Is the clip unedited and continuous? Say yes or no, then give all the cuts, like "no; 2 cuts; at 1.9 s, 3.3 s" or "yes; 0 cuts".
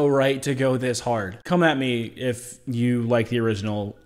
no; 1 cut; at 1.3 s